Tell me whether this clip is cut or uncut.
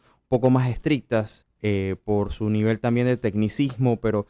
cut